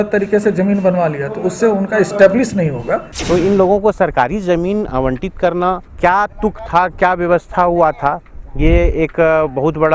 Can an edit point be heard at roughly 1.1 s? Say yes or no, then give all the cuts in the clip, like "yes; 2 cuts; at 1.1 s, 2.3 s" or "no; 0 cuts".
no; 2 cuts; at 3.1 s, 5.9 s